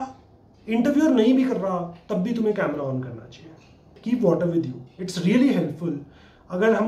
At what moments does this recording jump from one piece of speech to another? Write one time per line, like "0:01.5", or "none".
0:04.0